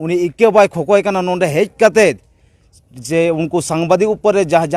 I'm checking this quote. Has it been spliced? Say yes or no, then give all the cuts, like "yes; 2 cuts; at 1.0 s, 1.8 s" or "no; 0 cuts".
no; 0 cuts